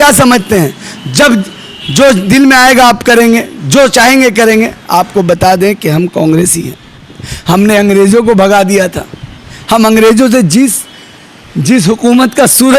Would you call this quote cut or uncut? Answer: uncut